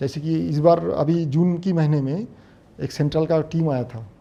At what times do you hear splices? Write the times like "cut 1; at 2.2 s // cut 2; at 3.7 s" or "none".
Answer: none